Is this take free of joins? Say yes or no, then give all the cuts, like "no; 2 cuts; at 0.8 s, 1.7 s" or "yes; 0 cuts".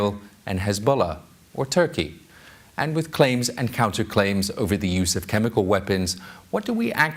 yes; 0 cuts